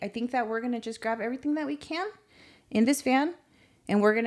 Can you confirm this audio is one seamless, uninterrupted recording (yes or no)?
yes